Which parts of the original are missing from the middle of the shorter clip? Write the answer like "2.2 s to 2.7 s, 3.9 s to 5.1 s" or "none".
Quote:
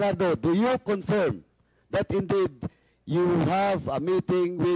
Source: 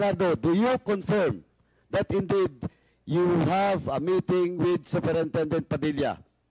none